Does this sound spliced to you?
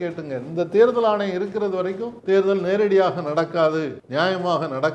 no; 0 cuts

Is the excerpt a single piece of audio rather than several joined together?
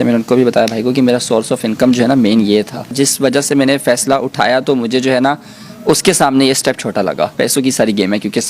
no; 2 cuts; at 3.4 s, 7.4 s

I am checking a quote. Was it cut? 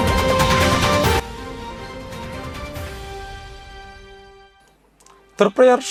no; 0 cuts

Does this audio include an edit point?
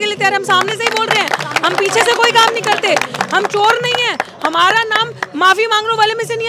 no; 0 cuts

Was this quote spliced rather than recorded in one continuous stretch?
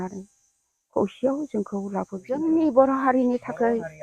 yes; 1 cut; at 2.4 s

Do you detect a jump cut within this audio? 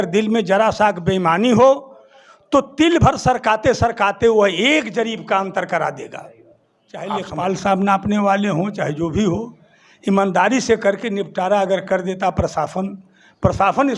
yes; 1 cut; at 7.1 s

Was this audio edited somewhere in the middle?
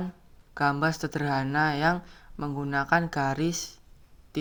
no; 0 cuts

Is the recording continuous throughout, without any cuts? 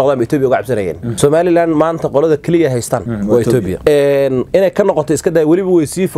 no; 3 cuts; at 1.0 s, 3.1 s, 3.8 s

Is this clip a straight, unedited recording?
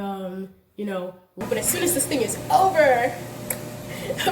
no; 1 cut; at 1.4 s

